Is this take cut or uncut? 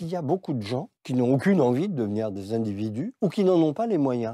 cut